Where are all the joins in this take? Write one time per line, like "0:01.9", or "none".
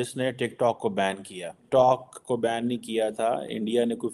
0:01.6